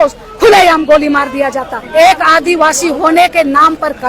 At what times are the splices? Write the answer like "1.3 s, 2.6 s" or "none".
1.7 s